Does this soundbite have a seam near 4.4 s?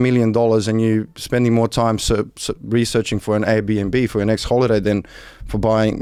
no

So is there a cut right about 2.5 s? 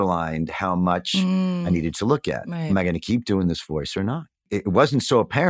yes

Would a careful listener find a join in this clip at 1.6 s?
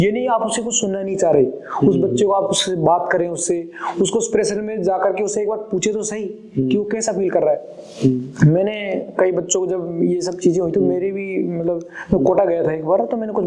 no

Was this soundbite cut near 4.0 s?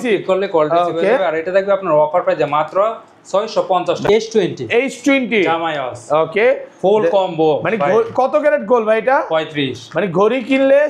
yes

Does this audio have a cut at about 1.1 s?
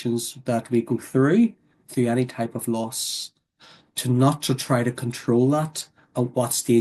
no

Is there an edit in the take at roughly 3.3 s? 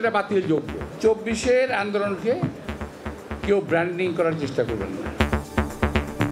no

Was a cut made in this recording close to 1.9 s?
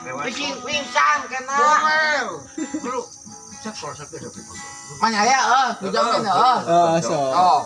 yes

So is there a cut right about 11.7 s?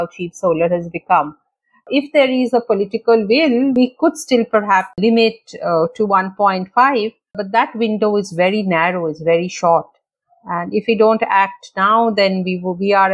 no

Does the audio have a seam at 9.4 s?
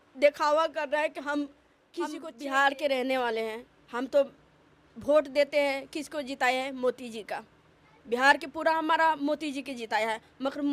no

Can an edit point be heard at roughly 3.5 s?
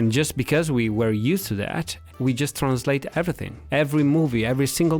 yes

